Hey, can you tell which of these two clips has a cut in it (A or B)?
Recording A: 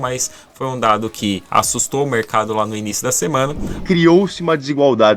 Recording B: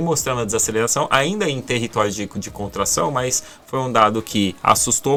A